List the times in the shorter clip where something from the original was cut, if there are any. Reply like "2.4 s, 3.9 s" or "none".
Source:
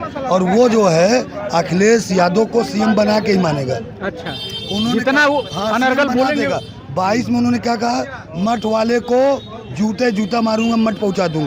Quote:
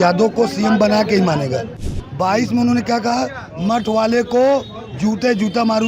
2.0 s